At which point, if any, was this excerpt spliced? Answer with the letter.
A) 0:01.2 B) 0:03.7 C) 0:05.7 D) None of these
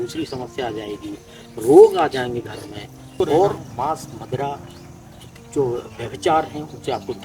B